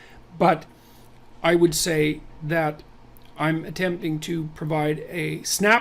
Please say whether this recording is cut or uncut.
cut